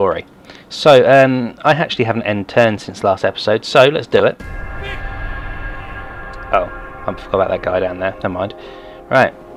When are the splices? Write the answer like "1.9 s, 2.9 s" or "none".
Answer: none